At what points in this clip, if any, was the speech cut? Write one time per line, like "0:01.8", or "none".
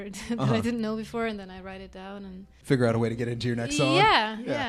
0:02.4